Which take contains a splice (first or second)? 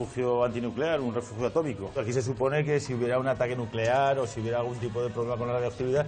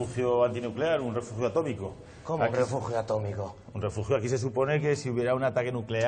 first